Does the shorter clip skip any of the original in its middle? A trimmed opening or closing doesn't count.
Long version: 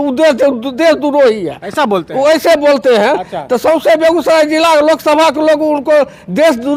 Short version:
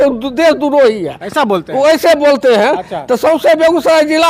no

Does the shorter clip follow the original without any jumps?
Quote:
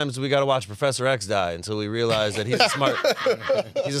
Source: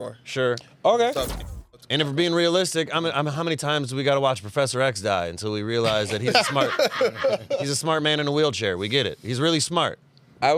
yes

